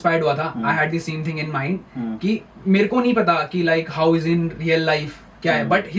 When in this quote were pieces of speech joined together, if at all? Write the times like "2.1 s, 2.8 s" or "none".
none